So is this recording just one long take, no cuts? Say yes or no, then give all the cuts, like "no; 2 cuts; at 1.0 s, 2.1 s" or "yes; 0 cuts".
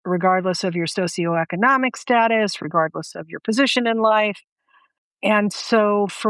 no; 1 cut; at 5.0 s